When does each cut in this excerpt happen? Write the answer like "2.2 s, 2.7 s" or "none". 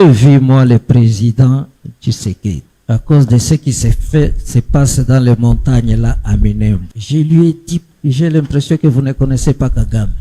2.7 s, 6.9 s, 7.9 s